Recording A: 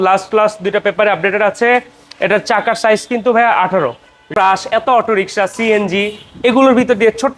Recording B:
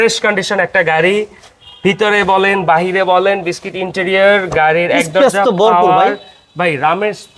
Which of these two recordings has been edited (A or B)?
A